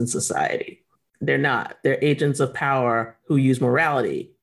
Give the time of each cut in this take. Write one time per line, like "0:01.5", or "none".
none